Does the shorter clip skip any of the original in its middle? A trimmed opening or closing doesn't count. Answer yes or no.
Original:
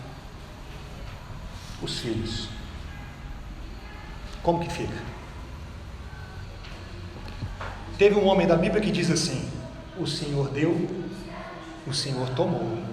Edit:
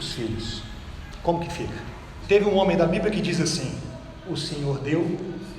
yes